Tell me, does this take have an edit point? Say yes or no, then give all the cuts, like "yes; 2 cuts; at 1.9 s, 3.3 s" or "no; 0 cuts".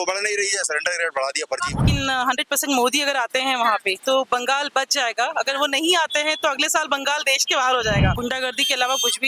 yes; 2 cuts; at 1.8 s, 8.1 s